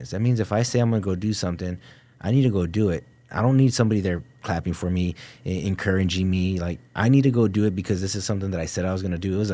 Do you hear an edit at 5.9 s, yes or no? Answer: no